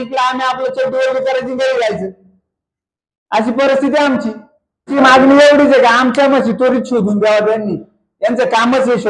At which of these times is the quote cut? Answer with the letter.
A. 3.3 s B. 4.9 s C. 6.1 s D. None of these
B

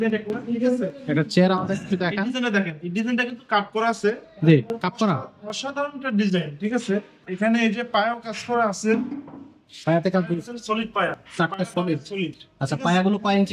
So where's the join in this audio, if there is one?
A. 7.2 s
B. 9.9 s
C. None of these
A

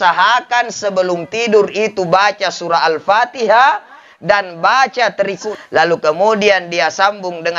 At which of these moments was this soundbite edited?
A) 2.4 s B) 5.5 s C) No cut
B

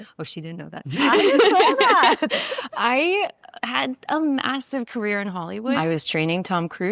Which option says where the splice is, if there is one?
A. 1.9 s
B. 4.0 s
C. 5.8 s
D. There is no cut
C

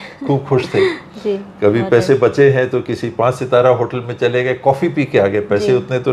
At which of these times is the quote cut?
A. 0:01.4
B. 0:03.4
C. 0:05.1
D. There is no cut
D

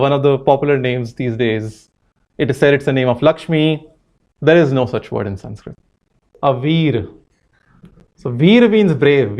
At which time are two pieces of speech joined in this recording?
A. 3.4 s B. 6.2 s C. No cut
B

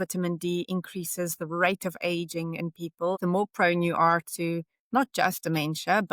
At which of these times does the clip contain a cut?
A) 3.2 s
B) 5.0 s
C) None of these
A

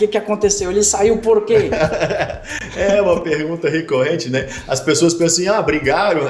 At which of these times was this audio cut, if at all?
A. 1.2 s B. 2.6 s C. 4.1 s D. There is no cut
D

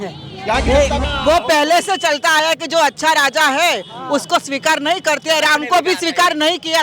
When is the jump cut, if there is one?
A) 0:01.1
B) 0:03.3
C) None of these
A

